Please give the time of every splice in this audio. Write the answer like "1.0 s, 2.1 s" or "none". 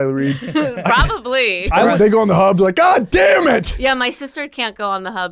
1.6 s